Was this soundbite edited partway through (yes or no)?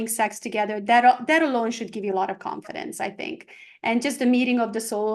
no